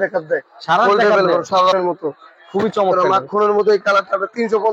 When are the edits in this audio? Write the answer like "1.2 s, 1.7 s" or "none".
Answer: 1.7 s